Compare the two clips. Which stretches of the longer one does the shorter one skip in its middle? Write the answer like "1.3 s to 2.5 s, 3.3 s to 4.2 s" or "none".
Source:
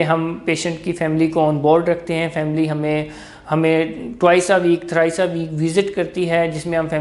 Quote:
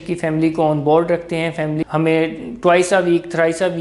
2.6 s to 3.4 s